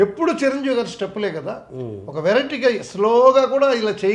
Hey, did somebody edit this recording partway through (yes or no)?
no